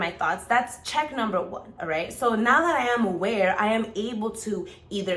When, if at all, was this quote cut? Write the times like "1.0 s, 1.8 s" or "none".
none